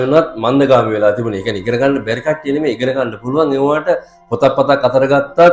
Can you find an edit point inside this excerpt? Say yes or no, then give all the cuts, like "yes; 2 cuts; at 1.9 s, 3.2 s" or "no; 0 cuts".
no; 0 cuts